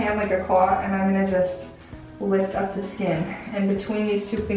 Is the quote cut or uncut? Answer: uncut